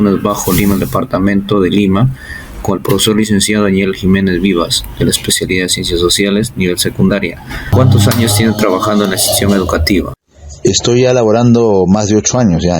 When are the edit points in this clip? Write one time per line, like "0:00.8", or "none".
0:01.0
0:07.7